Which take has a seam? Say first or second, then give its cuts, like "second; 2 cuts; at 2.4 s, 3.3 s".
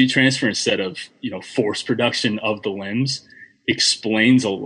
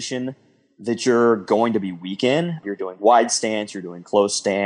second; 1 cut; at 2.6 s